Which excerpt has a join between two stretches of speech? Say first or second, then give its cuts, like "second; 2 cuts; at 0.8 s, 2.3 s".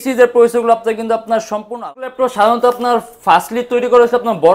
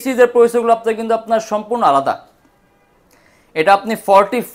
first; 1 cut; at 1.8 s